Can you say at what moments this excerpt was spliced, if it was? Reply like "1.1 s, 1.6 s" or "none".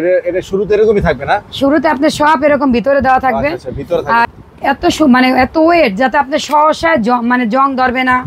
4.2 s